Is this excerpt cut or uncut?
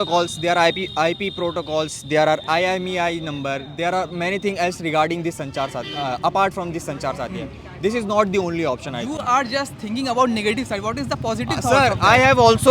uncut